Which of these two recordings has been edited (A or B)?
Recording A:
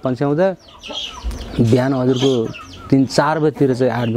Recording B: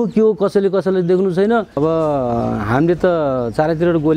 B